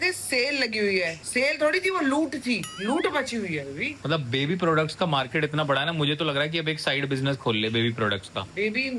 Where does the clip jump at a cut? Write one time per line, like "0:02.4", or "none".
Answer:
none